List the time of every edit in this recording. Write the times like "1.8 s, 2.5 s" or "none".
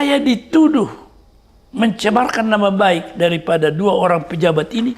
none